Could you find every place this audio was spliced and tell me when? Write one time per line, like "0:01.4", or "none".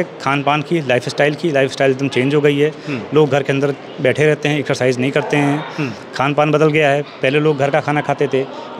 none